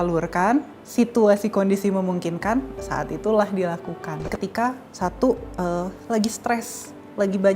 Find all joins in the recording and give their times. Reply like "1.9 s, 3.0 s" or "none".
4.3 s